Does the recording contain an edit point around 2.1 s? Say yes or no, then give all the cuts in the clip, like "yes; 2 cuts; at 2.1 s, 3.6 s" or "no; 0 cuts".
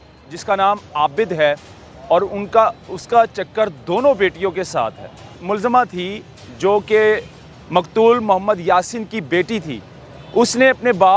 no; 1 cut; at 5.4 s